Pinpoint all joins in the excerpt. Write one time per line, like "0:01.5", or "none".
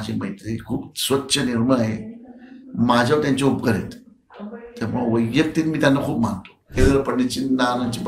0:06.8

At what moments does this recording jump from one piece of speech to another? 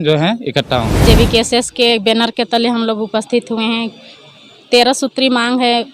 0:01.0

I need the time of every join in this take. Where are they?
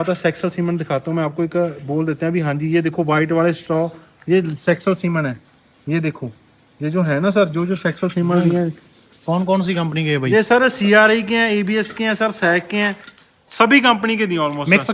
none

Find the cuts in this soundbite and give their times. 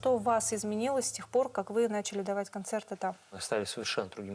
0:03.4

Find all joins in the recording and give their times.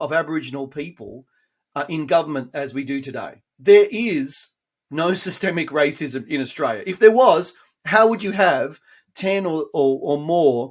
0:03.4

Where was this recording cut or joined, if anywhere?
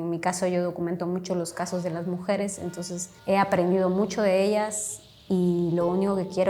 0:03.1

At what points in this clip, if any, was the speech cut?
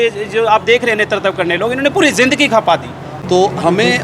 0:03.1

